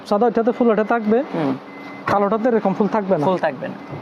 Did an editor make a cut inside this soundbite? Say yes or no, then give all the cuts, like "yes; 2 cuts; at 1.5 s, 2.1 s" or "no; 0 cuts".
no; 0 cuts